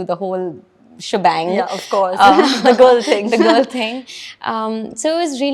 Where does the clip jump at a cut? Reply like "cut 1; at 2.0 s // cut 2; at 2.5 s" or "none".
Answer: none